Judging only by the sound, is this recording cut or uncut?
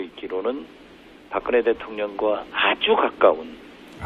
cut